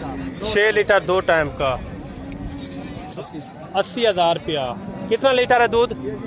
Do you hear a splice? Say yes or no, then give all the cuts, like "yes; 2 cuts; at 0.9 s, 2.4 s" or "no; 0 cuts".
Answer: yes; 1 cut; at 3.0 s